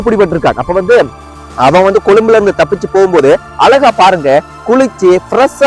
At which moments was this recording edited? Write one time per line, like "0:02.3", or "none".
none